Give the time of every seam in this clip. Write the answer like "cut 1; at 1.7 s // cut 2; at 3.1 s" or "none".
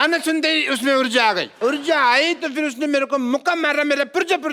cut 1; at 1.5 s